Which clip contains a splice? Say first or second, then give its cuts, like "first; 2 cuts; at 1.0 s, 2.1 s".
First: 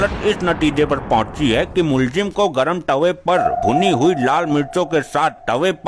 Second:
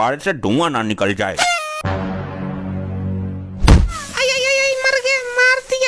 second; 1 cut; at 1.8 s